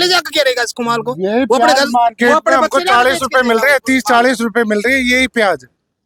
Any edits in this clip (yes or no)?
no